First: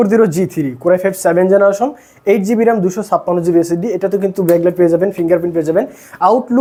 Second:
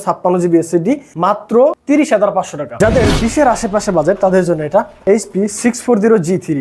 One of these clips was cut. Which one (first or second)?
second